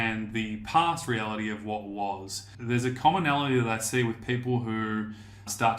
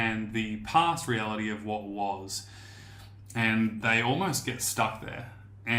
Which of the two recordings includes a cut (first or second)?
first